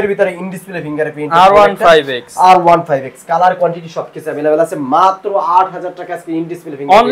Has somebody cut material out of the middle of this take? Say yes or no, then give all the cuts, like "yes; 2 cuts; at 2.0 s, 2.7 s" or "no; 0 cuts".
no; 0 cuts